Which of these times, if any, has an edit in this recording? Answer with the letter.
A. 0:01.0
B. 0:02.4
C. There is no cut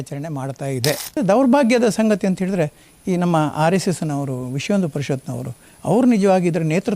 A